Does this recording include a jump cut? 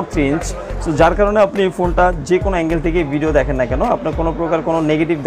no; 0 cuts

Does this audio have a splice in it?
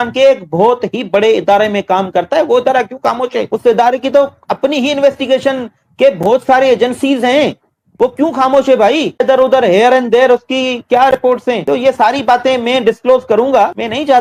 no; 0 cuts

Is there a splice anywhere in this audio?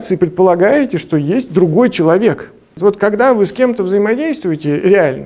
yes; 1 cut; at 2.7 s

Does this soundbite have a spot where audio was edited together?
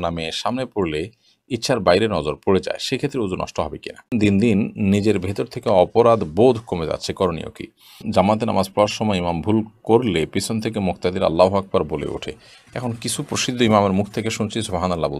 yes; 2 cuts; at 4.1 s, 8.0 s

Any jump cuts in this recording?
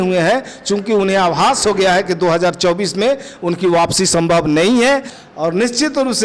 yes; 1 cut; at 5.2 s

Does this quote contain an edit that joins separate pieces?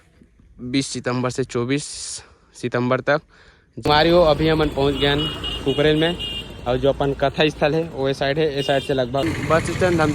yes; 2 cuts; at 3.8 s, 9.2 s

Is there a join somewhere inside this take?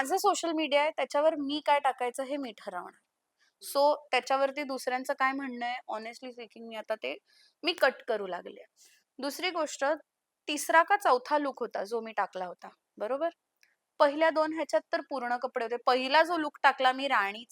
no; 0 cuts

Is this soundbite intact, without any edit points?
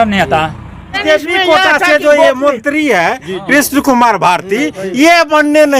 no; 1 cut; at 1.0 s

